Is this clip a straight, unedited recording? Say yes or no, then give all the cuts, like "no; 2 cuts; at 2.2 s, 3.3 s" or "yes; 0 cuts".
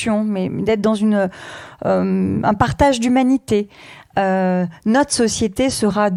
yes; 0 cuts